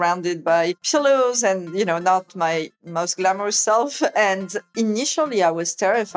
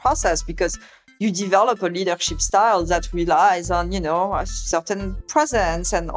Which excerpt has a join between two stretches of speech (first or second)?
first